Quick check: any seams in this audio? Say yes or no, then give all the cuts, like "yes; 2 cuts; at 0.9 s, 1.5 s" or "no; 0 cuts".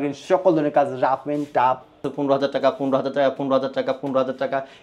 yes; 1 cut; at 2.0 s